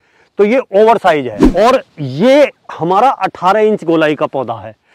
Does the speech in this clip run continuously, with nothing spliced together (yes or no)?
no